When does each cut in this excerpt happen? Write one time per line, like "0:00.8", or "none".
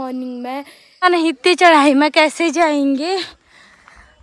0:01.0

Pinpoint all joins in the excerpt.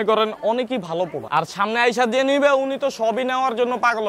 0:01.2

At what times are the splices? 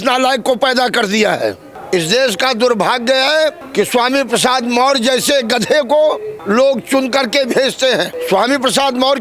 0:01.7
0:03.6
0:06.3
0:08.2

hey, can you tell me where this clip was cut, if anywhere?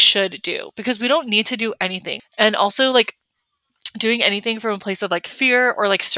0:02.1

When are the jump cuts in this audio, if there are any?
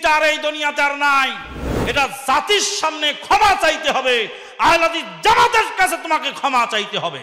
none

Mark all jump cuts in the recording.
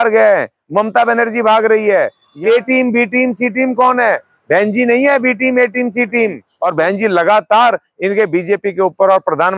0:02.2
0:06.5

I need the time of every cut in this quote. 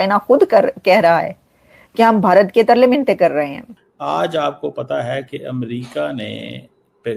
0:03.6

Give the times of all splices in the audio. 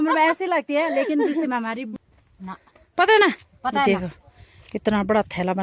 0:01.9

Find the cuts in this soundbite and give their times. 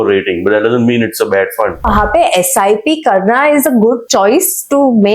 0:01.9
0:04.0

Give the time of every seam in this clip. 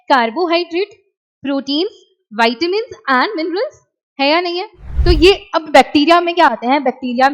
0:04.8

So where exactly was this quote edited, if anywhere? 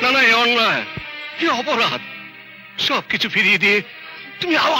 none

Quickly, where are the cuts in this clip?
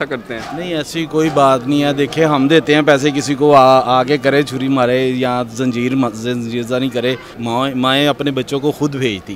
0:07.3

